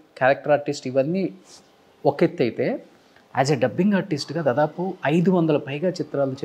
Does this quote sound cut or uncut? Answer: uncut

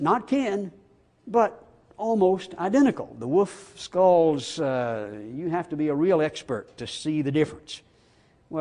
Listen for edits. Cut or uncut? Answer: uncut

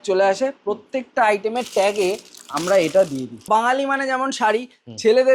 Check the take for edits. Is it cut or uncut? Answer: cut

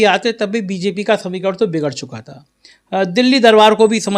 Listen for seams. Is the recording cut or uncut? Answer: uncut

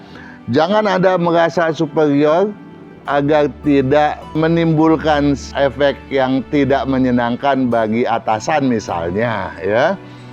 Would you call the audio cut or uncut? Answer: cut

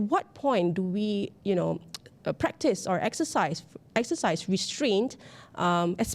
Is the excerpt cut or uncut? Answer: uncut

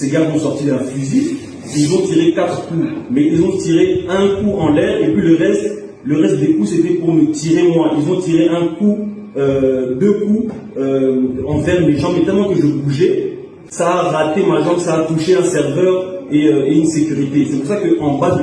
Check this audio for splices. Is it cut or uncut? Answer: uncut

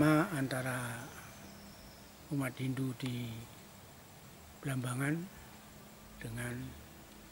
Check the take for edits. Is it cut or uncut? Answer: uncut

